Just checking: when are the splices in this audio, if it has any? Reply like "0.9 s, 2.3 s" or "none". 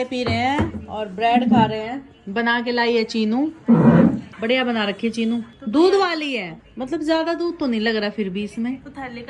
none